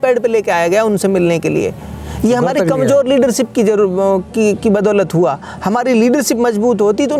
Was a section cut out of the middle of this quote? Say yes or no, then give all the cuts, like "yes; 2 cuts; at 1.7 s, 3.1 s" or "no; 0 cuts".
no; 0 cuts